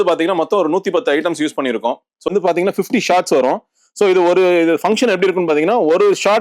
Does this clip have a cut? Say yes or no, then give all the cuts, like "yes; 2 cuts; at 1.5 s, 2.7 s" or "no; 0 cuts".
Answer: yes; 1 cut; at 2.3 s